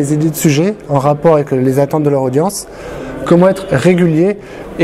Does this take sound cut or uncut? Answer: uncut